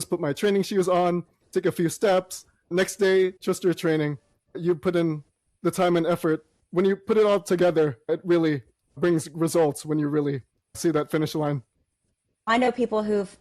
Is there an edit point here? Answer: yes; 3 cuts; at 3.4 s, 6.5 s, 12.5 s

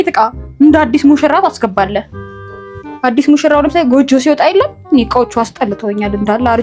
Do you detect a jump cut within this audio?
no; 0 cuts

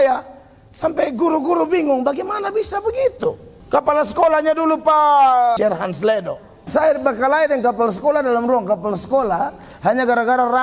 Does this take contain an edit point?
yes; 3 cuts; at 3.5 s, 5.6 s, 6.6 s

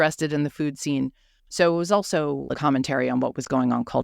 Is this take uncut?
no; 1 cut; at 2.5 s

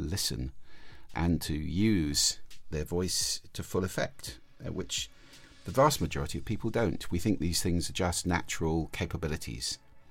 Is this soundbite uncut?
no; 1 cut; at 1.1 s

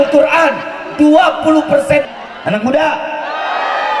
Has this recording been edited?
yes; 1 cut; at 2.1 s

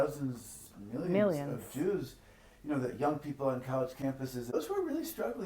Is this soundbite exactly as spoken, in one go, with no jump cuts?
no; 1 cut; at 4.5 s

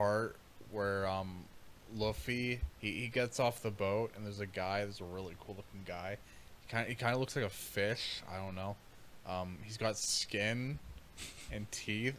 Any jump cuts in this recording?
yes; 1 cut; at 2.7 s

